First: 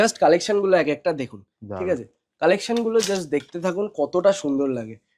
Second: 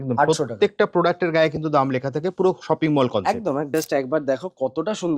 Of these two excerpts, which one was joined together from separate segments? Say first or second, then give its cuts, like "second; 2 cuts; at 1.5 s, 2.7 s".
second; 1 cut; at 3.7 s